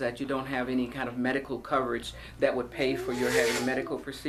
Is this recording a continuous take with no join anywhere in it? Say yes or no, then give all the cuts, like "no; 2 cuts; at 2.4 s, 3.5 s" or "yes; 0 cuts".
yes; 0 cuts